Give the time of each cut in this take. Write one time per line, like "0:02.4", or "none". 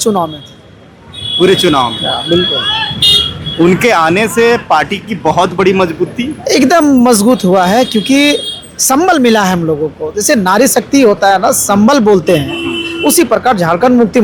none